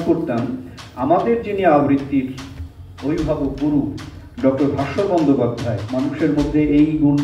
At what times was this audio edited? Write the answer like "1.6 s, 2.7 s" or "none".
5.9 s